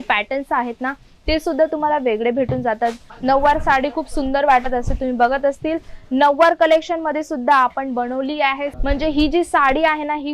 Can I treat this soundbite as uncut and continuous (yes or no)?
no